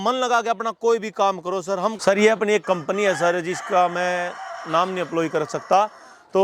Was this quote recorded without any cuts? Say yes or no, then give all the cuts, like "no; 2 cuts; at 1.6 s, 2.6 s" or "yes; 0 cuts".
no; 1 cut; at 2.0 s